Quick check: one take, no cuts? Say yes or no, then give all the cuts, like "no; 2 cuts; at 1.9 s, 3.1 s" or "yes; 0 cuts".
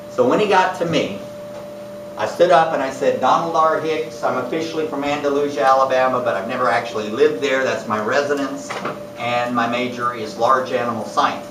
yes; 0 cuts